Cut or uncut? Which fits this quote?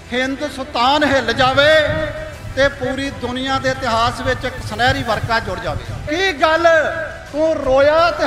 cut